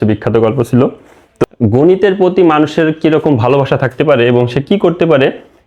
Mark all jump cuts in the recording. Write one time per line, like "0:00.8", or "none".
0:01.4